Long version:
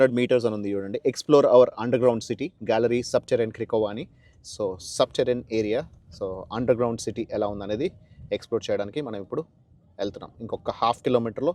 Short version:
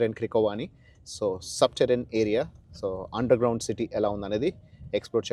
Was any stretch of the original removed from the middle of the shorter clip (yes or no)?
no